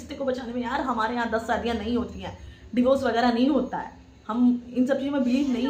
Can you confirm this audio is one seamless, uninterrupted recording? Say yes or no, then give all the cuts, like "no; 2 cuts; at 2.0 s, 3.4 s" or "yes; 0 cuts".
yes; 0 cuts